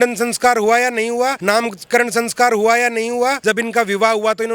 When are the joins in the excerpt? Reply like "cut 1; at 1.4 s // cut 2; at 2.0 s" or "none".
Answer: cut 1; at 1.4 s // cut 2; at 3.4 s